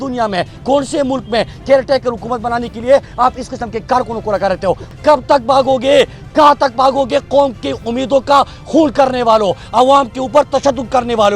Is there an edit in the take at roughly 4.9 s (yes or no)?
yes